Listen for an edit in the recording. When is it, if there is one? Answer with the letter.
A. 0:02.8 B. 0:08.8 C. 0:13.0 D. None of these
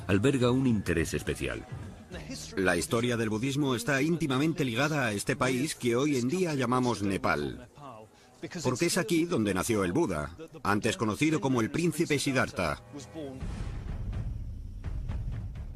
B